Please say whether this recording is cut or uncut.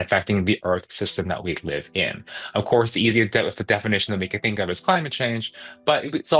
uncut